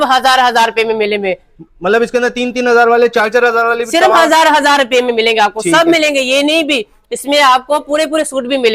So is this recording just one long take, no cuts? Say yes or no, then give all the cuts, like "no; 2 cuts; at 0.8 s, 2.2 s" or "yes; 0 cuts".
yes; 0 cuts